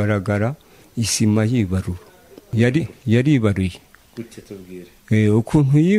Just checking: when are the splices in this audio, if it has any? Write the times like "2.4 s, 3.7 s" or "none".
none

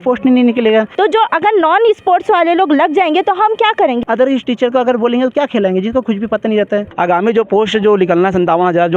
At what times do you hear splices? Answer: 0.9 s, 4.0 s, 6.9 s

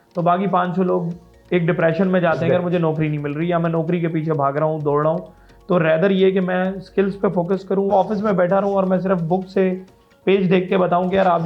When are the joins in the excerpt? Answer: 7.9 s

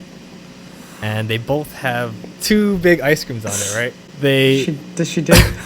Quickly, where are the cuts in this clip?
2.3 s, 4.0 s

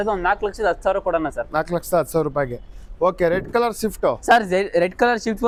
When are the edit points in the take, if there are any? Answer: none

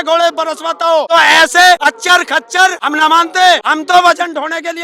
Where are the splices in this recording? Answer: 1.1 s, 1.8 s, 2.8 s, 3.7 s

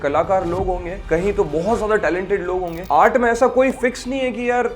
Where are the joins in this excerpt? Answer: 0.9 s, 2.8 s

